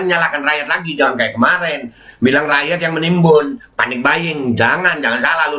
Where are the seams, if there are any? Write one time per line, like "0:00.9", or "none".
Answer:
none